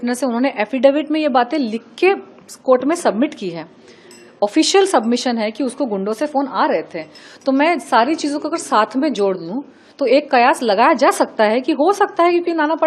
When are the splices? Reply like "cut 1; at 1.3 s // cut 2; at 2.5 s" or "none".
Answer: none